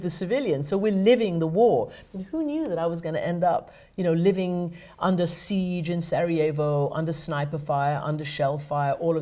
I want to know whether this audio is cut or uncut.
uncut